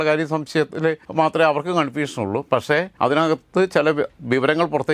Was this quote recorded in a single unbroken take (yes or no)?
no